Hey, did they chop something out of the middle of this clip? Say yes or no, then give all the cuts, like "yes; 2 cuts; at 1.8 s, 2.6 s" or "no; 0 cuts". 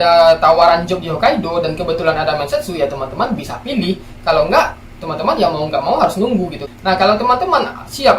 yes; 1 cut; at 6.6 s